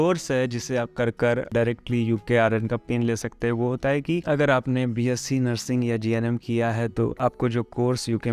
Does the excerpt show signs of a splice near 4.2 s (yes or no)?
yes